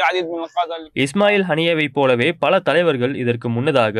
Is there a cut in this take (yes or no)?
no